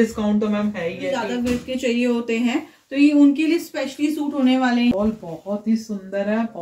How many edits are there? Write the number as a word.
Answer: two